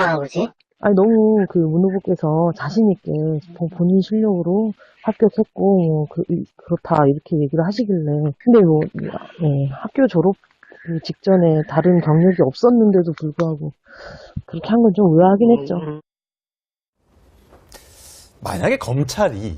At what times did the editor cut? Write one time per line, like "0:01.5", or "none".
0:08.9